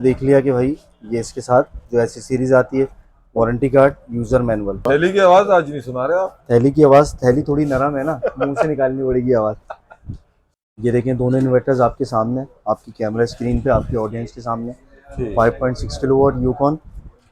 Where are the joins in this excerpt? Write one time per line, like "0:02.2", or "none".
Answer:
0:04.8